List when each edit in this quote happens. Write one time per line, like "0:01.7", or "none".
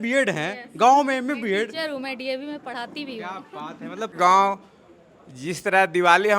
0:04.1